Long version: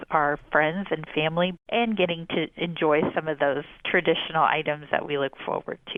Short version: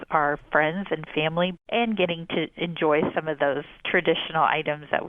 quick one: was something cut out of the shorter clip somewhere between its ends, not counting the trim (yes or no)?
no